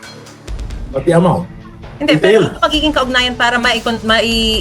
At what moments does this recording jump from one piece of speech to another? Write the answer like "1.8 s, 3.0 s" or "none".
1.9 s